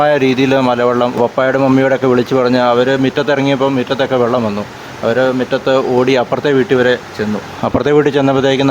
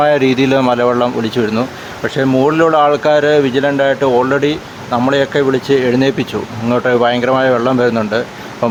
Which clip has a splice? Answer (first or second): first